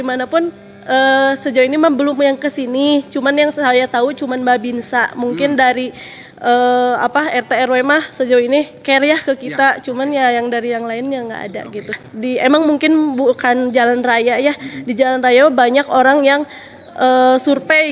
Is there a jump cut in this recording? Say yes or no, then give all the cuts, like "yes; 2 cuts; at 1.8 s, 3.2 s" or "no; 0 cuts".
yes; 1 cut; at 12.1 s